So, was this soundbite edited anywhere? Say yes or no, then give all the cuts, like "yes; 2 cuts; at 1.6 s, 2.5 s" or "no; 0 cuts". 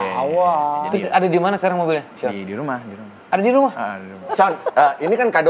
yes; 2 cuts; at 0.8 s, 4.3 s